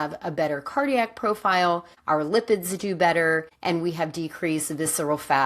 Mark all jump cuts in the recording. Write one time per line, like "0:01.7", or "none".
0:01.9
0:03.5